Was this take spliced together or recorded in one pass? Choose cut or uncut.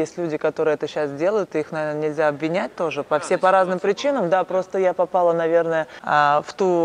cut